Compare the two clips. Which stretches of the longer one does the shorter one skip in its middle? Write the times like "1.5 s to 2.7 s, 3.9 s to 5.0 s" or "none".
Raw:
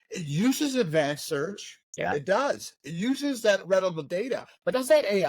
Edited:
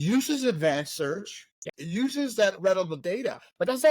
1.9 s to 2.7 s